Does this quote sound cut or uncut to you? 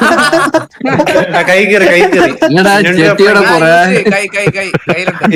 uncut